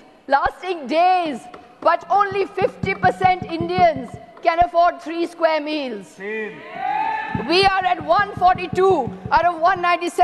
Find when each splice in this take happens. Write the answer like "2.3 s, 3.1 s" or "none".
none